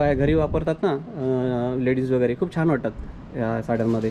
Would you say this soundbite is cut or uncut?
uncut